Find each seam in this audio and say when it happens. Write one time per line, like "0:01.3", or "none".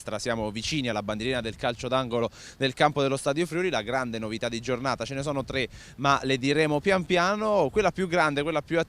0:04.0